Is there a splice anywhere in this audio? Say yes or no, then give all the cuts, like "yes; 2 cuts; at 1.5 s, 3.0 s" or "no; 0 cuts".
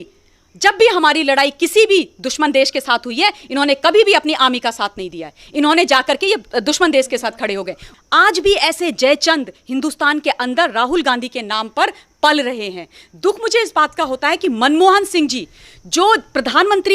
yes; 1 cut; at 7.9 s